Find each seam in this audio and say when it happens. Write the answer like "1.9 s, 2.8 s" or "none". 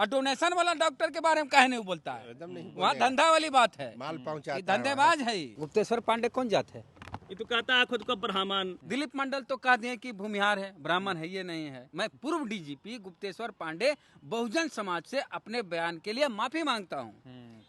5.6 s, 8.8 s, 11.9 s